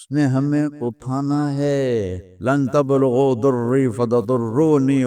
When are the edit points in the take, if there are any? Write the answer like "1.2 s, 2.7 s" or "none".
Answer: 2.2 s